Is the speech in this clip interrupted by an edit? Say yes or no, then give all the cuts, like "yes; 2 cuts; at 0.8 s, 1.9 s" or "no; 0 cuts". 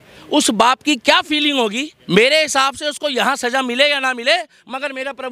yes; 1 cut; at 1.9 s